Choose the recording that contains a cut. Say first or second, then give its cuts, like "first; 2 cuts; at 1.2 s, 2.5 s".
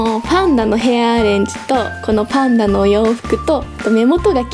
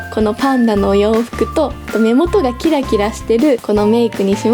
second; 1 cut; at 3.6 s